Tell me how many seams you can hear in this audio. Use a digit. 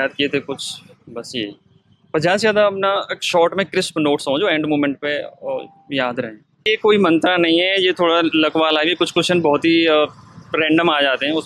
1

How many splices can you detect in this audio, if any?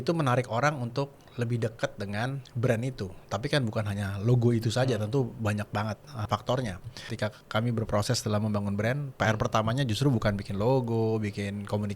3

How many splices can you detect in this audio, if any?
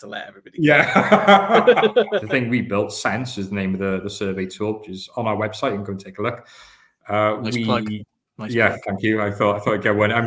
1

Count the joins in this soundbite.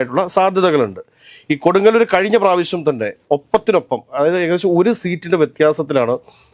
0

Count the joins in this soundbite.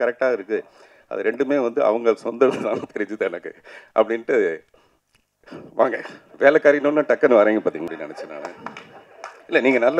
1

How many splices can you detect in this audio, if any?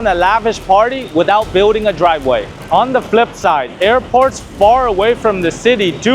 1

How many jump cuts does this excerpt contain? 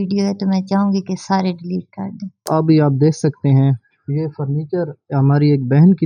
1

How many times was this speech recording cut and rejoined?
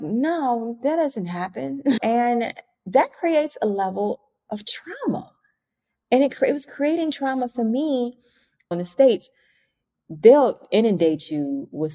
1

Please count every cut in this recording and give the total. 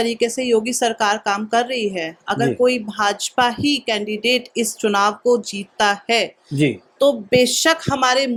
0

